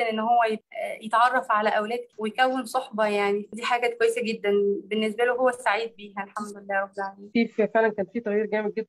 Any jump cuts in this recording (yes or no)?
no